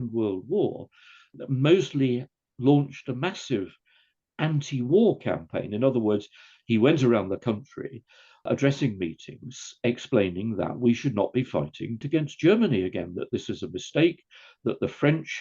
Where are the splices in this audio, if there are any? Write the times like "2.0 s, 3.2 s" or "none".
1.3 s, 8.5 s, 12.0 s

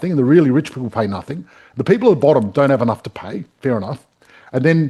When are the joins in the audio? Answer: none

